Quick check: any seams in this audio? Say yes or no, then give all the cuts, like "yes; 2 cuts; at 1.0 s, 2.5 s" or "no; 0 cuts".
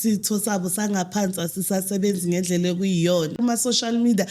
yes; 1 cut; at 3.3 s